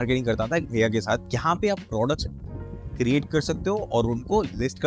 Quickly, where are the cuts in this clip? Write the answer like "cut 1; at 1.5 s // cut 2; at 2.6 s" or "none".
cut 1; at 1.3 s

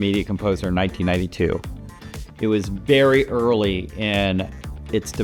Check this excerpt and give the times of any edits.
none

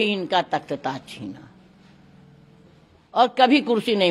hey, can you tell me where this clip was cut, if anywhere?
none

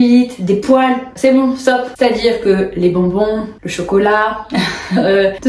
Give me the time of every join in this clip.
cut 1; at 1.9 s

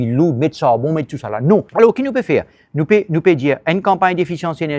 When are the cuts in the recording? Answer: cut 1; at 1.7 s

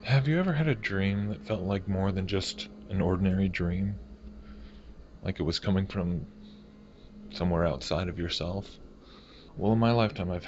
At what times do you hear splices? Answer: none

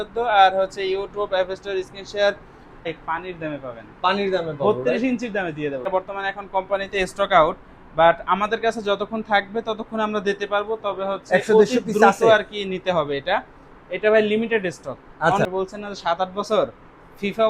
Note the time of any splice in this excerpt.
cut 1; at 2.9 s // cut 2; at 5.9 s // cut 3; at 15.5 s

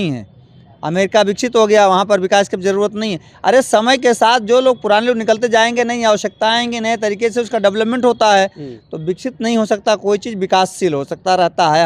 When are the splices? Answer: none

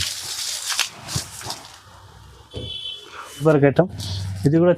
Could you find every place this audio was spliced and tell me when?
cut 1; at 3.4 s

